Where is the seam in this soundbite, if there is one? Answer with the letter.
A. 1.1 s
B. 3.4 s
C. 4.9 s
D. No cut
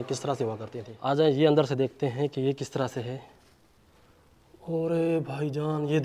A